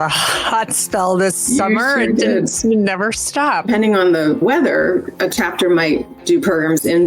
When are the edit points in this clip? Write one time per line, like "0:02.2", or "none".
0:03.7